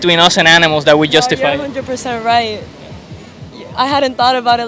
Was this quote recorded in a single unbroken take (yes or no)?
yes